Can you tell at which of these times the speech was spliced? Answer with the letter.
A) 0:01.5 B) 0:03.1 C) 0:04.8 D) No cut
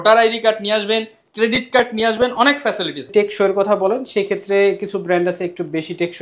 B